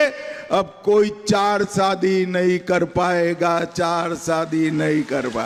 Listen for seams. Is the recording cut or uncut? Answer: uncut